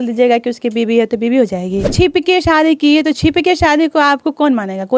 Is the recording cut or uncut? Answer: cut